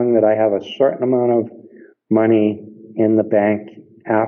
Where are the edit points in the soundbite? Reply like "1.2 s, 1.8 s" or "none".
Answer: none